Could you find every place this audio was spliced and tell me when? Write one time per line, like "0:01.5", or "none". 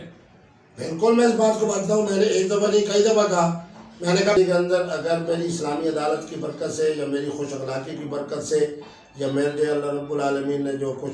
0:04.4